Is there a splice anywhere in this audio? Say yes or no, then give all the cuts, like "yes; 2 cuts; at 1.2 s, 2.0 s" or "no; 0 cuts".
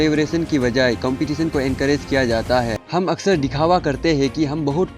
yes; 1 cut; at 2.8 s